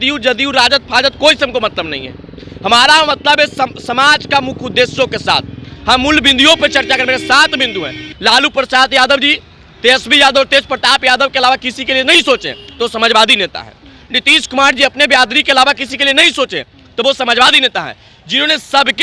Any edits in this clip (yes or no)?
yes